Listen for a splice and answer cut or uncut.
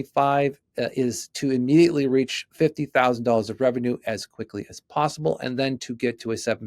uncut